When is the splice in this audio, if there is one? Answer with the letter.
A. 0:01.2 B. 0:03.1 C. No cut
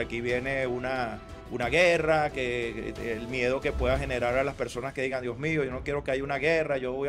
C